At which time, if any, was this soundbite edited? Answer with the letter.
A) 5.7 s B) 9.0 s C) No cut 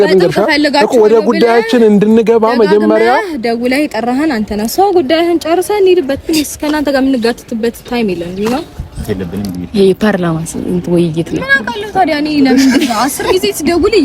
B